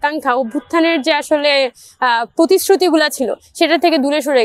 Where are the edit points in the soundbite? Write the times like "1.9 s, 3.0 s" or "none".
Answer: none

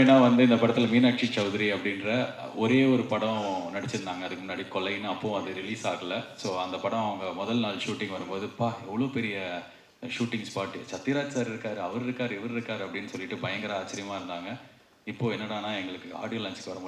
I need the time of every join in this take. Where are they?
none

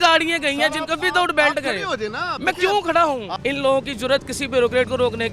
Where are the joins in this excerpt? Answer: 3.3 s

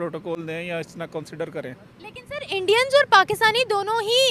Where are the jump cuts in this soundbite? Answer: none

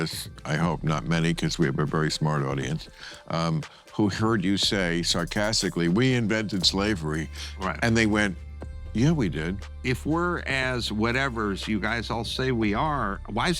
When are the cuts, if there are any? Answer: 9.7 s

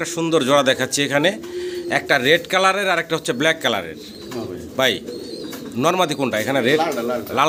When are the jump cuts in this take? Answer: none

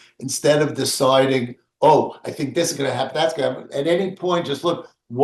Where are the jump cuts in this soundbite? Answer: none

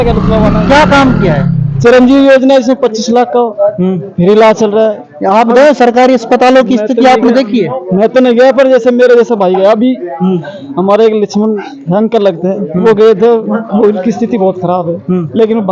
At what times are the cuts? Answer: none

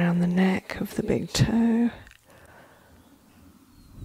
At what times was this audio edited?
none

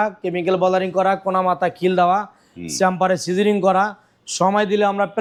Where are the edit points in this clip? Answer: none

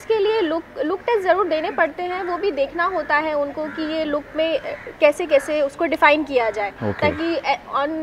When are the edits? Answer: none

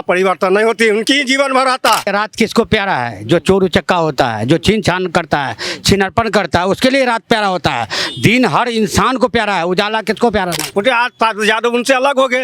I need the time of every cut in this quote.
2.1 s, 10.6 s

